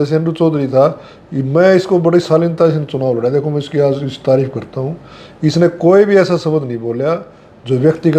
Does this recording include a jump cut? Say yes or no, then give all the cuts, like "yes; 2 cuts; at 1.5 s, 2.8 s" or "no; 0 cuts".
no; 0 cuts